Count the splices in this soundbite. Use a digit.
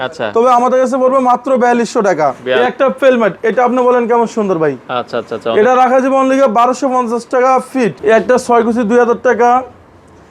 2